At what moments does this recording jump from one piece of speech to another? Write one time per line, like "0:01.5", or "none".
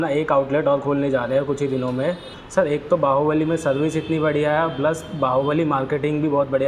0:02.3